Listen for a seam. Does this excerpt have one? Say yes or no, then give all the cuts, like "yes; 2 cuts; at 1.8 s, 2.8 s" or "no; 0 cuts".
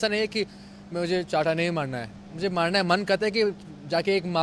no; 0 cuts